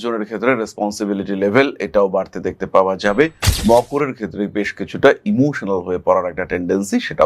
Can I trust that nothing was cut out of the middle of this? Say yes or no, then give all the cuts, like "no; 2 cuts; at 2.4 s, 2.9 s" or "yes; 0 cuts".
yes; 0 cuts